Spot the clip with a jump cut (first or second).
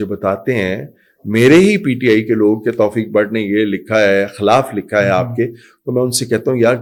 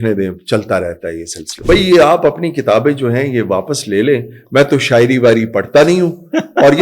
second